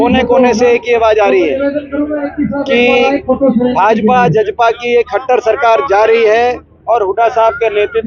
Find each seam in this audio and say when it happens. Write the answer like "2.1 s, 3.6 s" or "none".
none